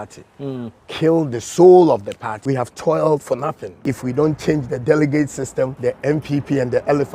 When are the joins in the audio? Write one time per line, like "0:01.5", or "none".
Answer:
0:02.3
0:03.8
0:05.7